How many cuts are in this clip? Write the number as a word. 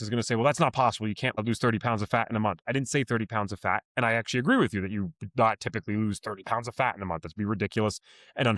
one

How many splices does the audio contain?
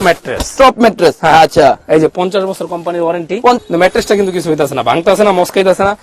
one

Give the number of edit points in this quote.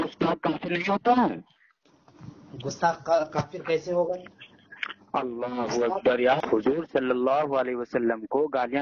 one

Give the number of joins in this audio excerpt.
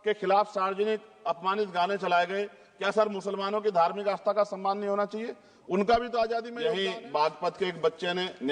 one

